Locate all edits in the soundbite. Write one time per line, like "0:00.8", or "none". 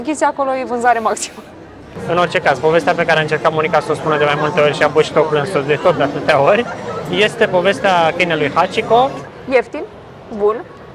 0:01.9
0:09.2